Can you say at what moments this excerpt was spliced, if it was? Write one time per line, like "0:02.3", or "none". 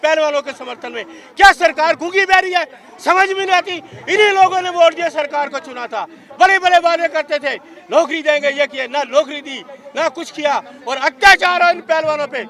none